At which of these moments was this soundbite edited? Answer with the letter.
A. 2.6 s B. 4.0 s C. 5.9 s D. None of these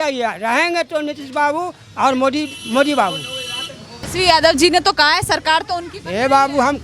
B